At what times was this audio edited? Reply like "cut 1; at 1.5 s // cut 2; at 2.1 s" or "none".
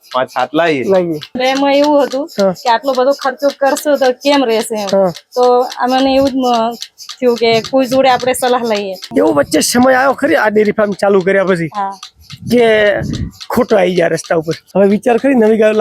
cut 1; at 1.4 s // cut 2; at 9.0 s // cut 3; at 14.6 s